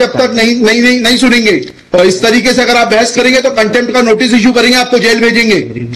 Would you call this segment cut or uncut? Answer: uncut